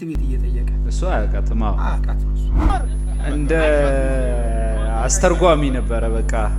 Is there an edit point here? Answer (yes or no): yes